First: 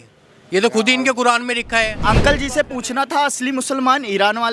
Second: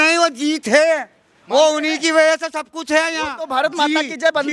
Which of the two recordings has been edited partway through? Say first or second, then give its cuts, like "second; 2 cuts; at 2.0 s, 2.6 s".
first; 1 cut; at 2.0 s